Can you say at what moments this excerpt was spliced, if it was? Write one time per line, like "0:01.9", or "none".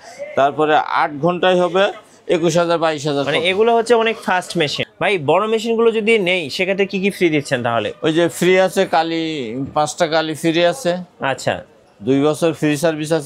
0:04.8